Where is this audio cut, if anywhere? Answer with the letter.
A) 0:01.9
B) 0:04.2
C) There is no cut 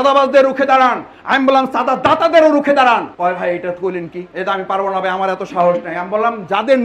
B